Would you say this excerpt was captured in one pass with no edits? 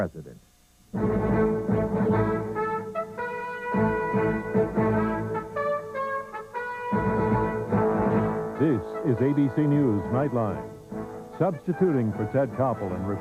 yes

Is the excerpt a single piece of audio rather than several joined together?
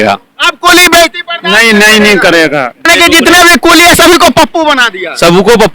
no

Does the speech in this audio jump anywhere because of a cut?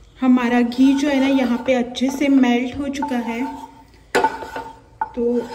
no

